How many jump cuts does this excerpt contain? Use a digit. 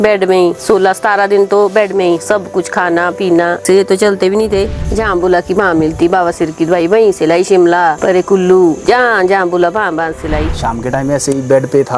2